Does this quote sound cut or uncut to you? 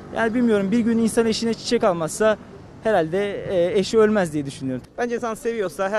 cut